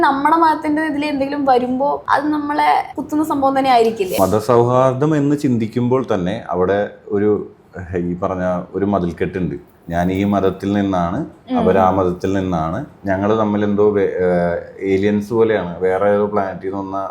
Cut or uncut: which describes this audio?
cut